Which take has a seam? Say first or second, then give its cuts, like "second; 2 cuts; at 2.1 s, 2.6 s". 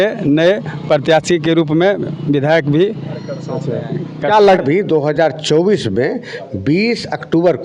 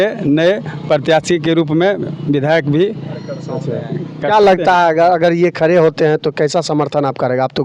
first; 1 cut; at 4.5 s